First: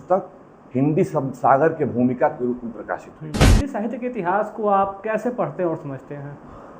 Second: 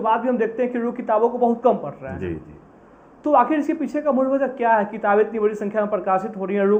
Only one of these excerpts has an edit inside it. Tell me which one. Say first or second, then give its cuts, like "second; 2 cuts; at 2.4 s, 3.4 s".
first; 1 cut; at 3.6 s